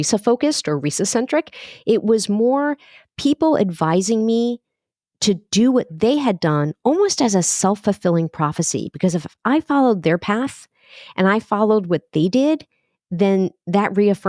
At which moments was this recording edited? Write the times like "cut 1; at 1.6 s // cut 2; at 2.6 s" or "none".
none